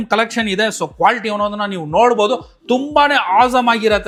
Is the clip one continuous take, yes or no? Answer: yes